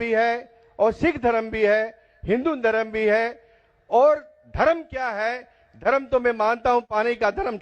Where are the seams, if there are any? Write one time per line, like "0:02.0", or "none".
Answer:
0:04.9